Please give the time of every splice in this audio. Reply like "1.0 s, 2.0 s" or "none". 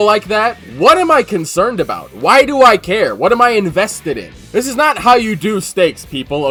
none